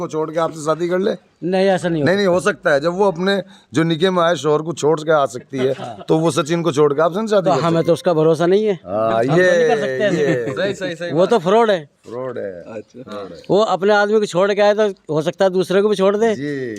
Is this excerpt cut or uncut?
uncut